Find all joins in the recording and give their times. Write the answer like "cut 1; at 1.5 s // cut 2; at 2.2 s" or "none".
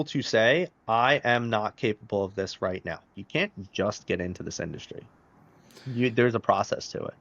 cut 1; at 3.1 s